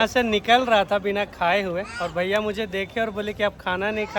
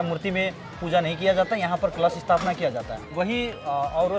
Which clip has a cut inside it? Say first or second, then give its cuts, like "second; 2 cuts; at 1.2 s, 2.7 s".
second; 1 cut; at 3.0 s